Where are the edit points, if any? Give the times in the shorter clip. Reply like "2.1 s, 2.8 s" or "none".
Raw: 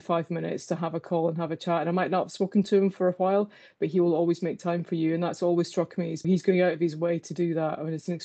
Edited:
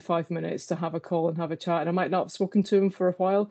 none